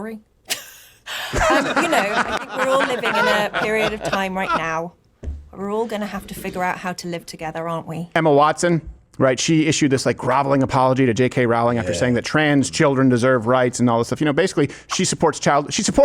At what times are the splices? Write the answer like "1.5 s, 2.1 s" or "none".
8.1 s

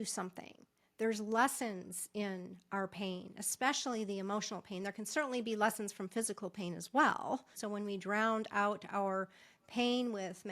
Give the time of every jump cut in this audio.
7.5 s

